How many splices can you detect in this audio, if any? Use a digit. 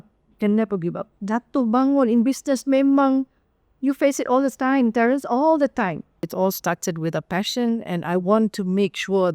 1